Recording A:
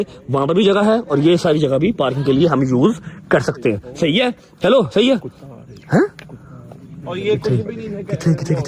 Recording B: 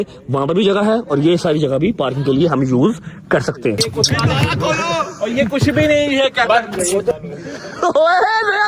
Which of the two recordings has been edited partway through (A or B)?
B